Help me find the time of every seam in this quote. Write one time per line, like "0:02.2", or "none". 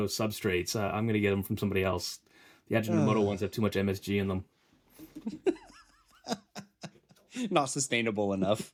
none